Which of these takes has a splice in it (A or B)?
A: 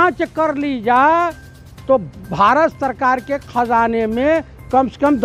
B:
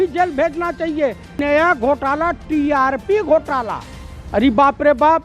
B